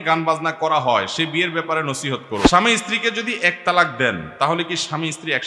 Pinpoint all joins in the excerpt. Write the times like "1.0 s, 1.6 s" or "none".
2.5 s

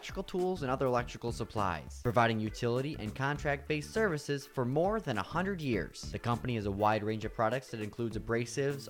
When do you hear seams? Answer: none

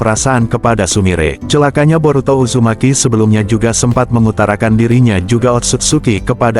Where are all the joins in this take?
1.4 s

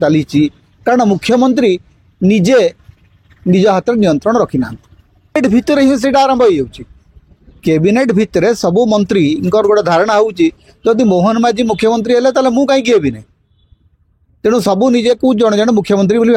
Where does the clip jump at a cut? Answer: 5.4 s

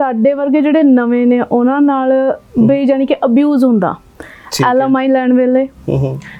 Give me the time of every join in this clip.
none

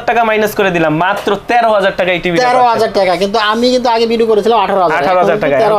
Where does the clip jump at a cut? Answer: none

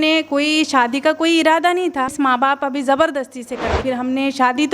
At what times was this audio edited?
2.1 s, 3.8 s

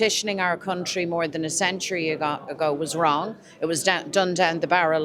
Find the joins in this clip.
none

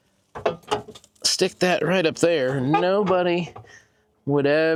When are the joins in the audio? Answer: none

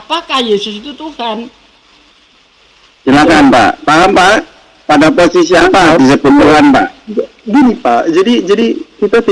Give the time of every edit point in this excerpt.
none

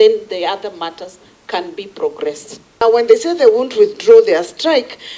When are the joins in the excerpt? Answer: 2.7 s

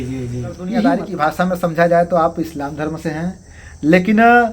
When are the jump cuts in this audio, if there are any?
1.1 s

